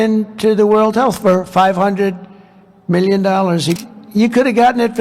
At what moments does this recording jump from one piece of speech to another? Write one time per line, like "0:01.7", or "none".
0:03.8